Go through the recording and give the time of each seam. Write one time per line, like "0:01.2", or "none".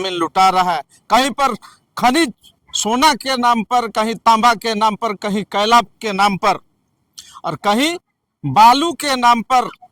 none